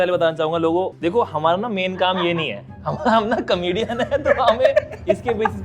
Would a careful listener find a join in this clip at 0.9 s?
yes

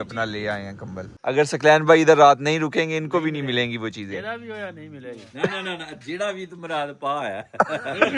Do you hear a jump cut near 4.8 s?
no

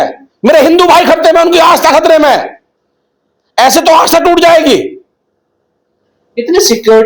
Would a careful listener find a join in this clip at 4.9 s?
no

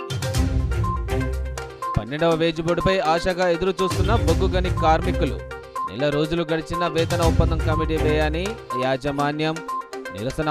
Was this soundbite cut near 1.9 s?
yes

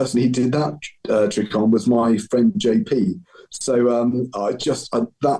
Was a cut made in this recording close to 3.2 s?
no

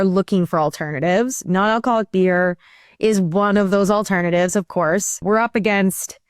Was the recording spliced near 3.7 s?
no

